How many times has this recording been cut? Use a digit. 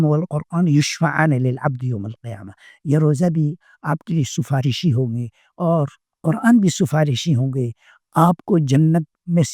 0